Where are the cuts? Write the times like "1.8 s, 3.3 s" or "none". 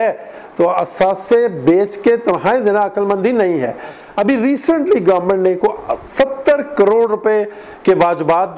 none